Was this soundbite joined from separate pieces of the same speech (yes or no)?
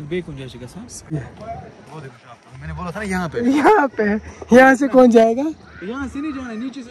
yes